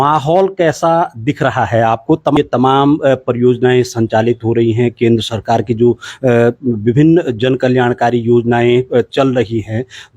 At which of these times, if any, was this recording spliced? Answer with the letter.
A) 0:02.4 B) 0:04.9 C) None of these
A